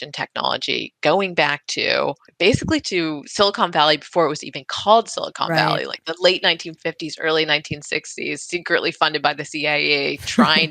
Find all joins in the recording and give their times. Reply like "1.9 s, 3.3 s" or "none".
2.3 s